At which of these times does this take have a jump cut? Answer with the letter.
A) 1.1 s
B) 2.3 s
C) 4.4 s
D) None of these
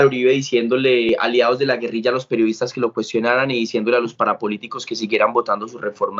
A